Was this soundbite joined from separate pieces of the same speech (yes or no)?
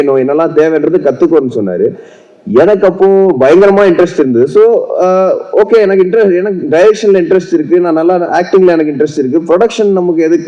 no